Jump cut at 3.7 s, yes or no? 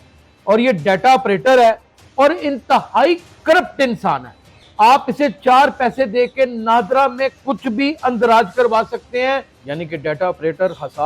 no